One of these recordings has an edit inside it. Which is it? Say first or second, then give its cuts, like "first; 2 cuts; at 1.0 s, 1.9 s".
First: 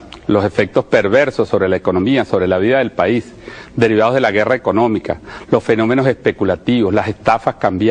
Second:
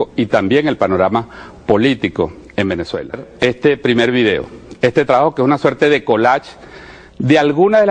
second; 1 cut; at 6.4 s